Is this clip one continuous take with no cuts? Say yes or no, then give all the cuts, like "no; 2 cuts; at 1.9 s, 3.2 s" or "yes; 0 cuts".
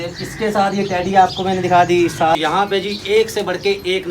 no; 1 cut; at 2.3 s